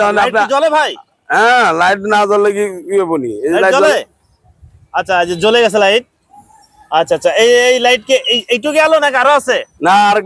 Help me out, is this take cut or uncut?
uncut